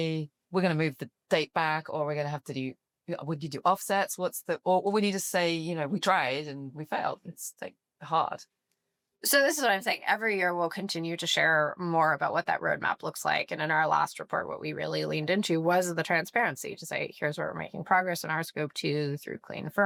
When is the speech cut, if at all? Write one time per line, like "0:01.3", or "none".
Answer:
none